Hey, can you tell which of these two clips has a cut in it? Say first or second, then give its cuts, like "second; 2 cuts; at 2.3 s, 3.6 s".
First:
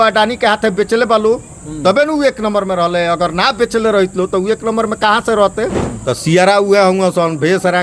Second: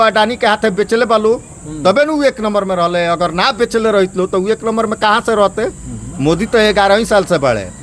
first; 1 cut; at 5.9 s